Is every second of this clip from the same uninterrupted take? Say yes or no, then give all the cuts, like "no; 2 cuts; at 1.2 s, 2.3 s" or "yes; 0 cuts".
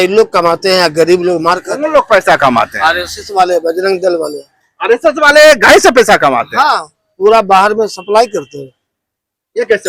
yes; 0 cuts